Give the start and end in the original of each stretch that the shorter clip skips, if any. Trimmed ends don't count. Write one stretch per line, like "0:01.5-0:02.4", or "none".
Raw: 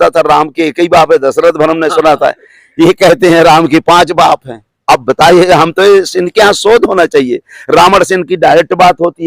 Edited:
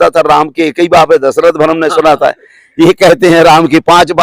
none